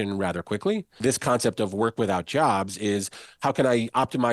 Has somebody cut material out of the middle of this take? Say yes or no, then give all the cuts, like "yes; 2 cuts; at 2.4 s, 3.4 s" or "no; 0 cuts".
yes; 1 cut; at 1.0 s